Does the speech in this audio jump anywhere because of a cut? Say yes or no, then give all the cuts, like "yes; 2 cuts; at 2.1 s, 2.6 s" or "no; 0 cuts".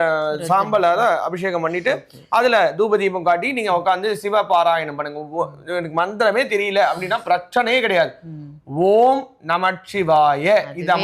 no; 0 cuts